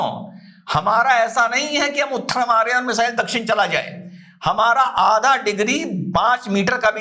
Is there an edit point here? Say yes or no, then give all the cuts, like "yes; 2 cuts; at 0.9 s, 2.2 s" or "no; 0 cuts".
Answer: no; 0 cuts